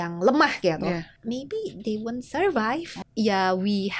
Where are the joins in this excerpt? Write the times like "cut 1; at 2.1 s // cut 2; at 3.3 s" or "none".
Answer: cut 1; at 1.1 s // cut 2; at 3.0 s